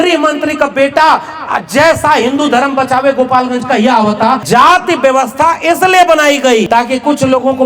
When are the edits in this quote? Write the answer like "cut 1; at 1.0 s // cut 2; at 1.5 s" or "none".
cut 1; at 4.4 s // cut 2; at 6.7 s

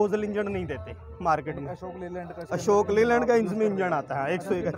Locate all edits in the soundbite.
none

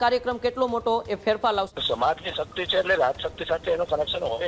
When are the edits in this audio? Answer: cut 1; at 1.7 s

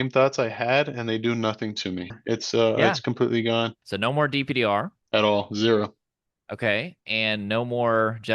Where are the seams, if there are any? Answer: cut 1; at 2.1 s // cut 2; at 3.8 s // cut 3; at 5.0 s

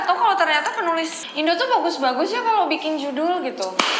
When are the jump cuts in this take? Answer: cut 1; at 1.2 s

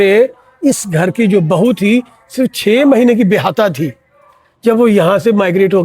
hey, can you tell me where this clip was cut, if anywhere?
none

